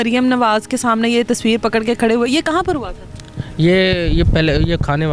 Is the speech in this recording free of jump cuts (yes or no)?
yes